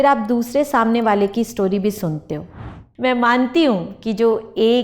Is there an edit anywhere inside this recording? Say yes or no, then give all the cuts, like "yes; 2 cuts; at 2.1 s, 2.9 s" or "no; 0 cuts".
yes; 1 cut; at 2.5 s